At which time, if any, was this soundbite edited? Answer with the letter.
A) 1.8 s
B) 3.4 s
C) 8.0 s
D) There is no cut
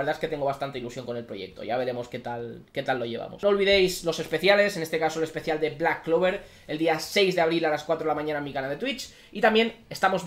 B